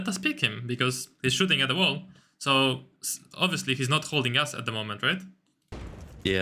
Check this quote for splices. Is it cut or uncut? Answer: uncut